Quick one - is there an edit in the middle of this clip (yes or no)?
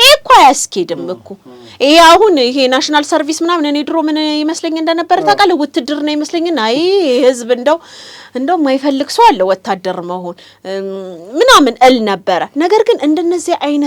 no